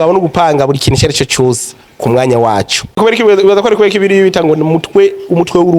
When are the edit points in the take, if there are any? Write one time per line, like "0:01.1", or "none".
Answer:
0:03.0